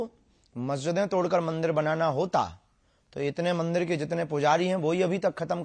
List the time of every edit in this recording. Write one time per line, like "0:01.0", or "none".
none